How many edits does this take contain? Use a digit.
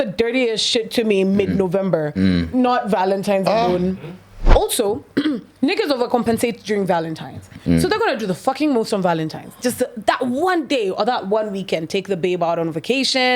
1